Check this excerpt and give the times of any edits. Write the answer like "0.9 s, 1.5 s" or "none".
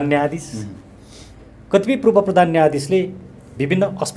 none